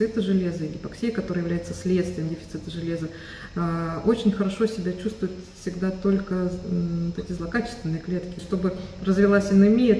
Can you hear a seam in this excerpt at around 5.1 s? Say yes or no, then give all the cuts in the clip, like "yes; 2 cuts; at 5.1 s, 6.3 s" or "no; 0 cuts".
no; 1 cut; at 8.4 s